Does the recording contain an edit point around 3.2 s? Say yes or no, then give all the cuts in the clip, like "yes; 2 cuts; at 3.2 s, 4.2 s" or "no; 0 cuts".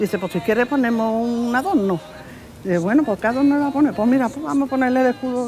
no; 0 cuts